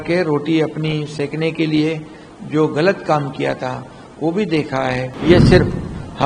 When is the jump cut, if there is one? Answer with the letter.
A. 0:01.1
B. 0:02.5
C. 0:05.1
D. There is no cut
C